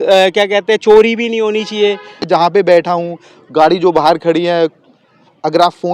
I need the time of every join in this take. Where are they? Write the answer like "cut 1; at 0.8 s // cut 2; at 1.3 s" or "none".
cut 1; at 2.3 s